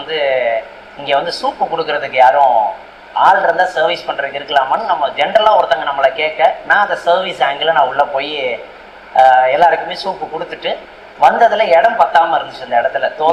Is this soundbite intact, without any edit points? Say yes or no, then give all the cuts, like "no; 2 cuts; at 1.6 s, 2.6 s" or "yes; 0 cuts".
yes; 0 cuts